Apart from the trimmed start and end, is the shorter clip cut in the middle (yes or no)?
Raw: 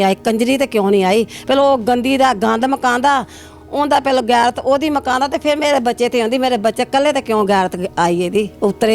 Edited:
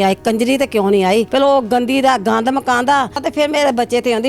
yes